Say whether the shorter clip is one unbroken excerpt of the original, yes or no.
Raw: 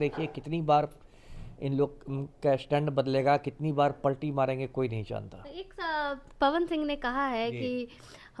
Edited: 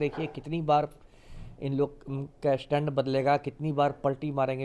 yes